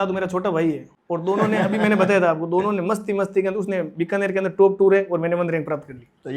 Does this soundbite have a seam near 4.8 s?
no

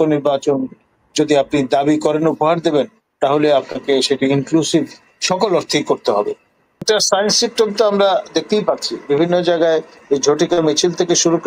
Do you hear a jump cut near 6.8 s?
yes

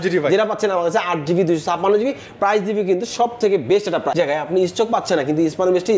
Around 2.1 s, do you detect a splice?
no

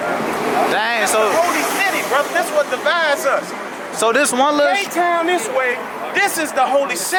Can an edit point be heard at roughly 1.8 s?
no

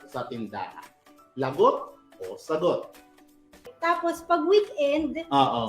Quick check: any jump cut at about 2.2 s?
no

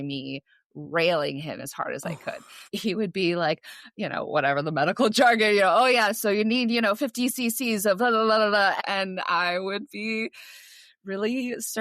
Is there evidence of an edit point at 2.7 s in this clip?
yes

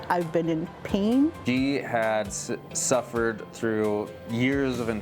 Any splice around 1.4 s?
yes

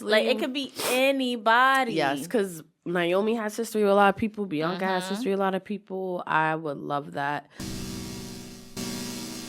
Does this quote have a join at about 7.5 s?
yes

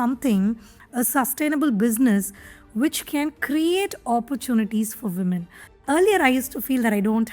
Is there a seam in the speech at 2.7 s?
no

